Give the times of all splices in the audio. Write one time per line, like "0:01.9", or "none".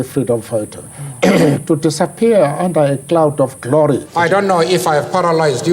0:04.1

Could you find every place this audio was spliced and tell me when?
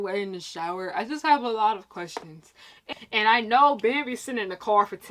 0:02.8

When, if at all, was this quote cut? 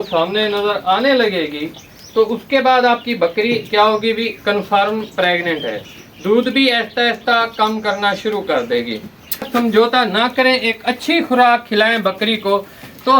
0:09.5

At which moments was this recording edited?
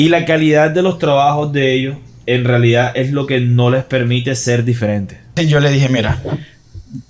0:05.3

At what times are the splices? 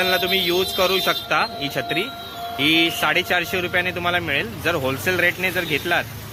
none

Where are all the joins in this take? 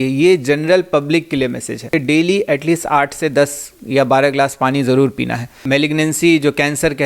0:01.9
0:05.6

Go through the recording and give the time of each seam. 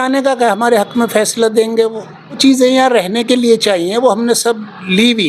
0:02.4

